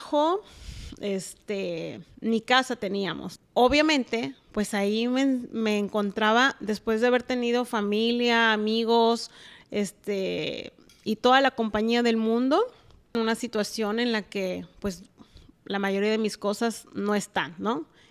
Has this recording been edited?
yes; 2 cuts; at 3.2 s, 13.1 s

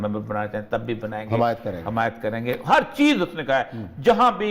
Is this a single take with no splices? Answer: yes; 0 cuts

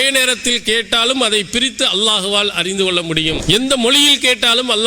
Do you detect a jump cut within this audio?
yes; 1 cut; at 3.4 s

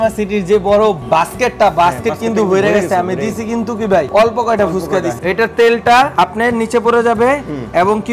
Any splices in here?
yes; 4 cuts; at 1.0 s, 4.1 s, 5.1 s, 6.1 s

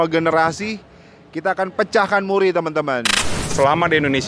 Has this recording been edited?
yes; 1 cut; at 3.4 s

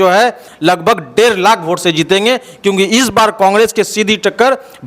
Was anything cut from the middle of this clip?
no; 0 cuts

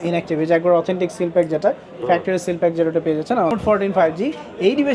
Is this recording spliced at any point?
yes; 1 cut; at 3.5 s

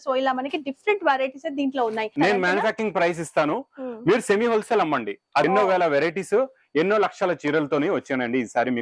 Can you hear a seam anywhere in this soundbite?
yes; 2 cuts; at 2.1 s, 5.4 s

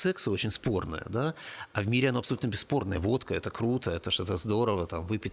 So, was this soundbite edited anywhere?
no; 0 cuts

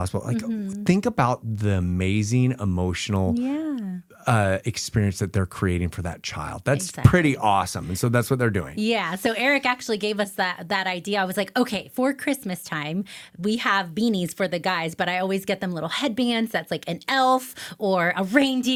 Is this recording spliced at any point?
no; 0 cuts

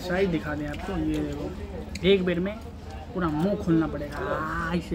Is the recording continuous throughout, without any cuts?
yes; 0 cuts

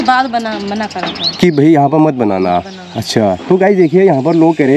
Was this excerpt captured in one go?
yes; 0 cuts

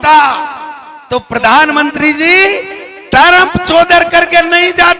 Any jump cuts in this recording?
no; 0 cuts

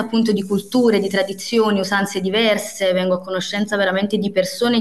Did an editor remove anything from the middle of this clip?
no; 0 cuts

